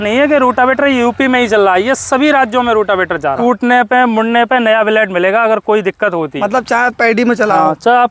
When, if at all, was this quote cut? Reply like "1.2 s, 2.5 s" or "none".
3.4 s, 6.3 s